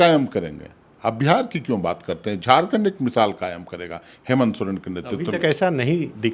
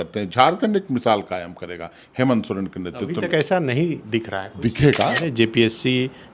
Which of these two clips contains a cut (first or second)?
second